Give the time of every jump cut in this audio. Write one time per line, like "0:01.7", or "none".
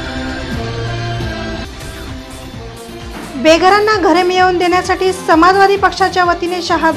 0:02.5